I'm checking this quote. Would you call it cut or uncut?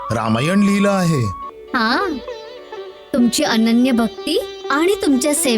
cut